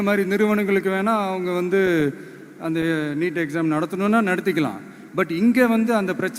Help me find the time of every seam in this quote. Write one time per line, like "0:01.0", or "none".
none

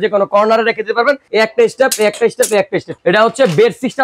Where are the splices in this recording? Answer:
0:01.2
0:02.9

